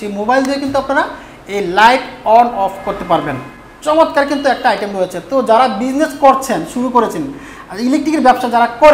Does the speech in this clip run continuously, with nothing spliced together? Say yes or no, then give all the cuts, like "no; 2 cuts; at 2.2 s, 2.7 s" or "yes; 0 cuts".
yes; 0 cuts